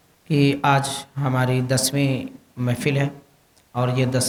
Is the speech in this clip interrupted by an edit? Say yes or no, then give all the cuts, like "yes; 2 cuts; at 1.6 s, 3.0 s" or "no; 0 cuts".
no; 0 cuts